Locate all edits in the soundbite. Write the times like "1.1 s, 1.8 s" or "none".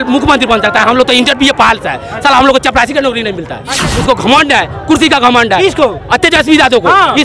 3.9 s